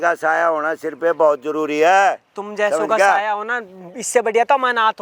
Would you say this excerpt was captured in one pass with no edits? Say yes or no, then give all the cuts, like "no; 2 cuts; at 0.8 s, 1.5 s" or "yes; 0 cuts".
yes; 0 cuts